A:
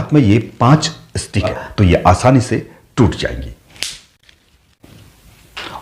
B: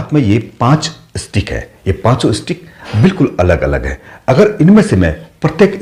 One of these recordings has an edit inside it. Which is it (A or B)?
A